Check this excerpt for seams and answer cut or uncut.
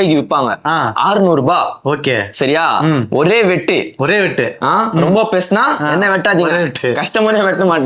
uncut